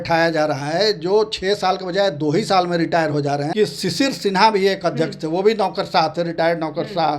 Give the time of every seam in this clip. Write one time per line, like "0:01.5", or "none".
0:03.5